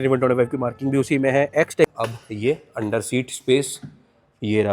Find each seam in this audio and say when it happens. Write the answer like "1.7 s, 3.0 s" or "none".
1.9 s